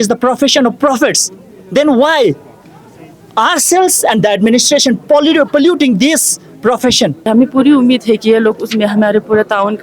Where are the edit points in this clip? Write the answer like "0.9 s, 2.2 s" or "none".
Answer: 7.3 s